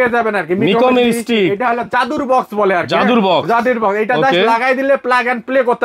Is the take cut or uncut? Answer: uncut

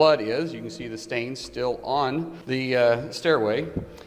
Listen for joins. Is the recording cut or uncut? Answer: cut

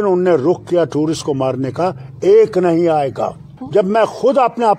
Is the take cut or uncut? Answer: cut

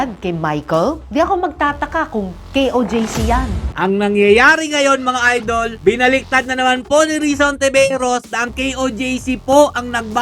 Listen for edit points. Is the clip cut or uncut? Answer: cut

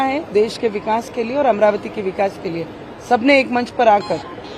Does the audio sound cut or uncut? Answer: uncut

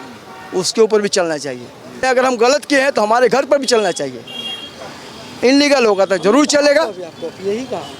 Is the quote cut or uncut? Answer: uncut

